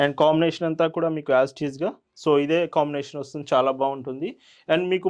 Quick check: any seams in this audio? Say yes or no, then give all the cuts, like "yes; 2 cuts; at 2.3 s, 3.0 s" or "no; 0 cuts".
no; 0 cuts